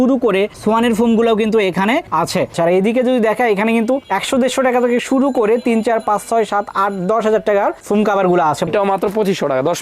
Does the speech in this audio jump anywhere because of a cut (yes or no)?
yes